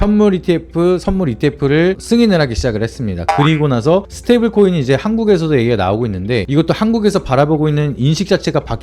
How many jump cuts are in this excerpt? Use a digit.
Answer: 0